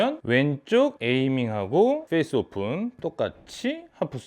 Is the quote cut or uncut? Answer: cut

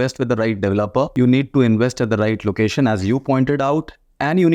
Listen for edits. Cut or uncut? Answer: cut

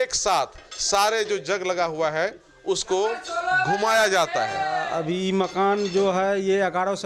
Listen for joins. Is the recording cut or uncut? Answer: cut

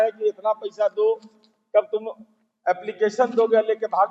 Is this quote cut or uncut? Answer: uncut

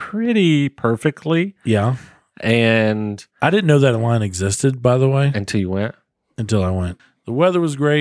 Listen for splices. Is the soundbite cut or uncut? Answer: cut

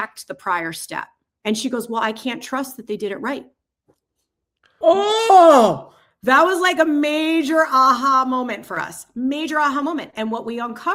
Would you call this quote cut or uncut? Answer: cut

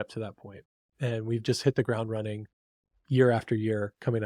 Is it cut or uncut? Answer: cut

